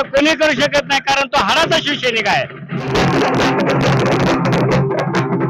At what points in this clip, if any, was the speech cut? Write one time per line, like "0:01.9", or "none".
0:02.9